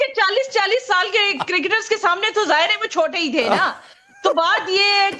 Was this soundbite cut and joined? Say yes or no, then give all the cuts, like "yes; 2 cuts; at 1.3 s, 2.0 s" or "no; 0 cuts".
yes; 1 cut; at 2.8 s